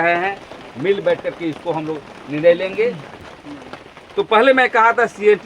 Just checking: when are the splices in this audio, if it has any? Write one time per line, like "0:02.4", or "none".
0:03.3